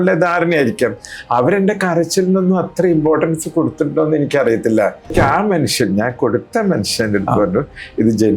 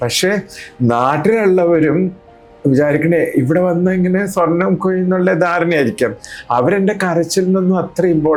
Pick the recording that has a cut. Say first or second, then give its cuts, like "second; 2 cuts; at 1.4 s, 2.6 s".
first; 1 cut; at 5.1 s